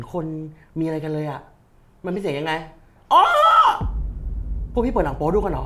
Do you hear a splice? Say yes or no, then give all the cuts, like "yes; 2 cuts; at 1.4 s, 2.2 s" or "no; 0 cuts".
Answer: no; 0 cuts